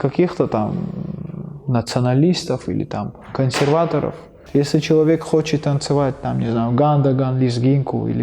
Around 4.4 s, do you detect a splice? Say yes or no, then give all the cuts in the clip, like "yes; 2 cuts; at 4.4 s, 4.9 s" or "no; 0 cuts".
yes; 1 cut; at 4.4 s